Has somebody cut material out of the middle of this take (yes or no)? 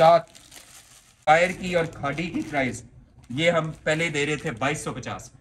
yes